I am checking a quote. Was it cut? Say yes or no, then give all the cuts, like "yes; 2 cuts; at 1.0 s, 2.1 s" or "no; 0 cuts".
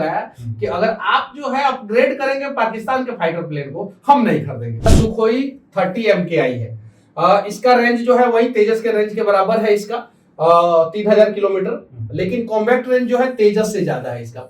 yes; 1 cut; at 5.0 s